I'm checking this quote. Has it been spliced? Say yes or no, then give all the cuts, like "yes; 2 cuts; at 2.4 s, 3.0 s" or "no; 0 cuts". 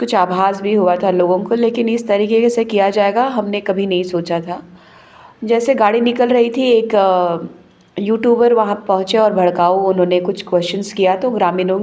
no; 0 cuts